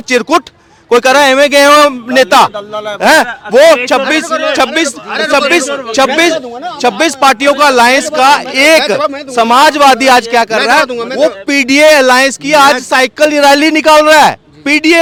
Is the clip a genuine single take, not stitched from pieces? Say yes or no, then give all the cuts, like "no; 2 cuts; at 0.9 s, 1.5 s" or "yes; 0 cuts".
yes; 0 cuts